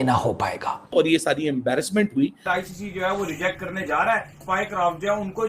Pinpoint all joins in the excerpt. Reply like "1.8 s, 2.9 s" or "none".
0.8 s, 2.4 s, 4.4 s